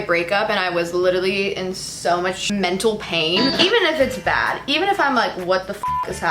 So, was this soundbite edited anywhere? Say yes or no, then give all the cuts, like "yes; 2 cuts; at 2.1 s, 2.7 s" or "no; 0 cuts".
yes; 2 cuts; at 2.4 s, 3.5 s